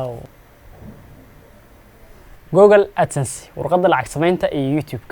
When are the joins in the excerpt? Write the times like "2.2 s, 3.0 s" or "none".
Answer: none